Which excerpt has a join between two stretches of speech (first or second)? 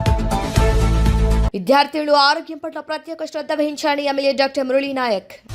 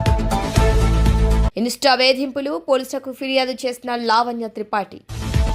first